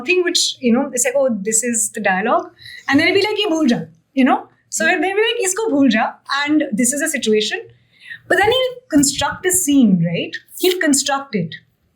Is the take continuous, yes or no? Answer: yes